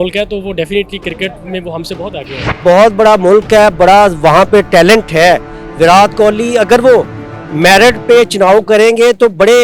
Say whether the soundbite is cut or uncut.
cut